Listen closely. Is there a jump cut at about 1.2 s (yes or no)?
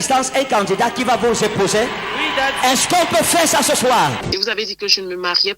no